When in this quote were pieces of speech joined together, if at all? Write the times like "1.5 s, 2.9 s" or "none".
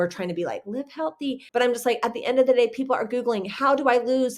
1.4 s